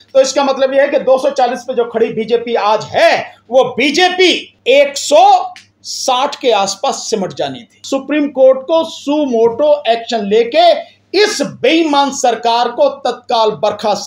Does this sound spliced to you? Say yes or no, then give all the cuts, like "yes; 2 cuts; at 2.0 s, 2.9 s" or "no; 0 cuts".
yes; 2 cuts; at 4.5 s, 7.8 s